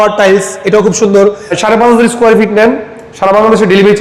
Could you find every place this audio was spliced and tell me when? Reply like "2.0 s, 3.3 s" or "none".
1.5 s